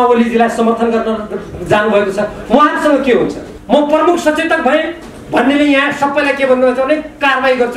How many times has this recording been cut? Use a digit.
1